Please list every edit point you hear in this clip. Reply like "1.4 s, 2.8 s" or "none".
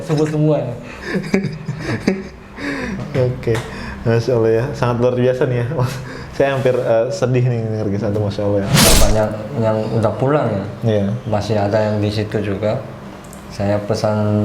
8.8 s